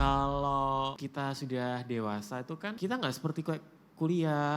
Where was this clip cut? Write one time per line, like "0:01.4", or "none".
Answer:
0:01.0
0:02.8